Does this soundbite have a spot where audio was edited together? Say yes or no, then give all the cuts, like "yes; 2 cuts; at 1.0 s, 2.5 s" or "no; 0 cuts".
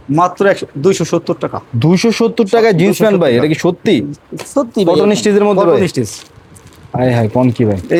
no; 0 cuts